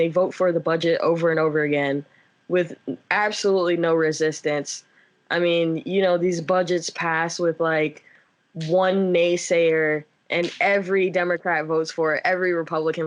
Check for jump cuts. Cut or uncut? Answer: uncut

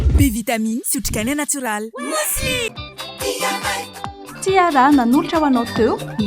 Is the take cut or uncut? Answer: uncut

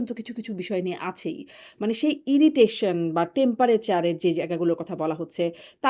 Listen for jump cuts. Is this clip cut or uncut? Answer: uncut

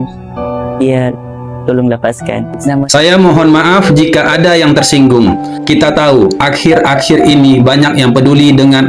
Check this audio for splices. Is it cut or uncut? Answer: cut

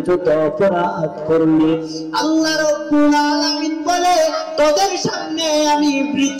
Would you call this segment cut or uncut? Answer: uncut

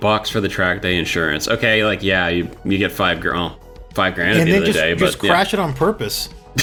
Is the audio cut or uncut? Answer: uncut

